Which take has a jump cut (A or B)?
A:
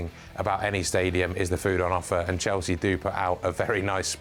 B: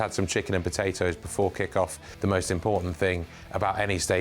B